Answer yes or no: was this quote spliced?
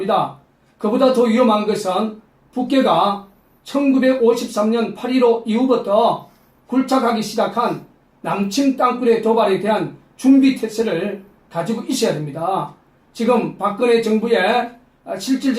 yes